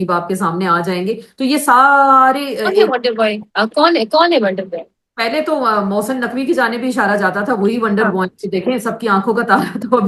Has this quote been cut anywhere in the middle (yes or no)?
no